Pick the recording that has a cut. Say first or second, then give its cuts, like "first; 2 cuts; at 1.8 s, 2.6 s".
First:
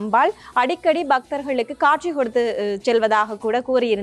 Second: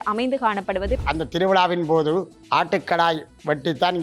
second; 2 cuts; at 1.0 s, 2.4 s